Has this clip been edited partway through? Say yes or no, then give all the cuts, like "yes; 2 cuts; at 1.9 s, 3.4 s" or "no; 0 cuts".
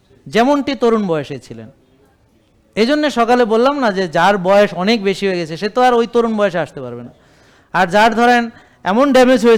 no; 0 cuts